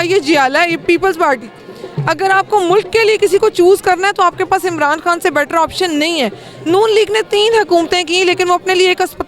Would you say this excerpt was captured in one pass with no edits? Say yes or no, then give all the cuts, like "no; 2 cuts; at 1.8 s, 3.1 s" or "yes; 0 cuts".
yes; 0 cuts